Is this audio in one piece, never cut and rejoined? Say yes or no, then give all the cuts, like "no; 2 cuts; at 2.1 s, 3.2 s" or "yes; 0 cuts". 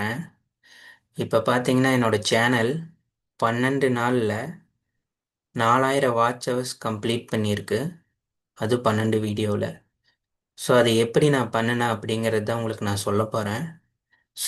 yes; 0 cuts